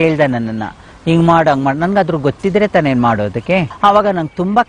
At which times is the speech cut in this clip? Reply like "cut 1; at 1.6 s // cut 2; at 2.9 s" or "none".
none